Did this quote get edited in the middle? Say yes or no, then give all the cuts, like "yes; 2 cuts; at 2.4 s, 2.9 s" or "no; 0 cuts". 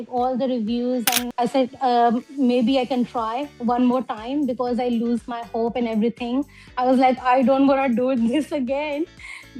yes; 1 cut; at 1.3 s